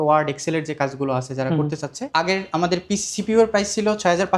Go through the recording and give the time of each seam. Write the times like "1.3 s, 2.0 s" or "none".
2.1 s